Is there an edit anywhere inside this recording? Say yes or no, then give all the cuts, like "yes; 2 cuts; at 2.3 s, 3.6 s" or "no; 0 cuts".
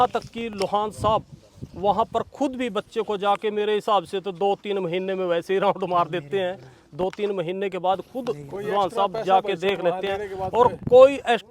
no; 0 cuts